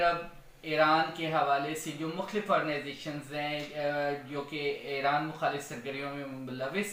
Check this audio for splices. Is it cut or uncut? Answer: uncut